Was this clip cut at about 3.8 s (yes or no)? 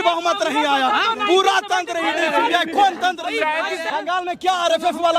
yes